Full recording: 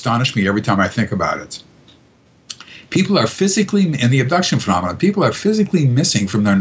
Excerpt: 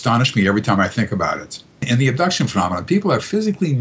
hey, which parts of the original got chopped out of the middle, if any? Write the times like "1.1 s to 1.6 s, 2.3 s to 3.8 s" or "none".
1.8 s to 4.0 s